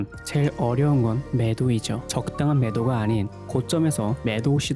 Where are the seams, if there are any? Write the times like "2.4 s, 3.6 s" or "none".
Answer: 2.0 s